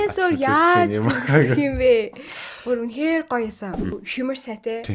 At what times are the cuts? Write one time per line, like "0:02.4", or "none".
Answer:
0:04.0